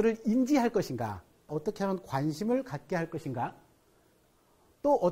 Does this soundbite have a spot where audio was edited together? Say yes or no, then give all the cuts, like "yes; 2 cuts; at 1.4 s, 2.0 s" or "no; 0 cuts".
yes; 1 cut; at 1.5 s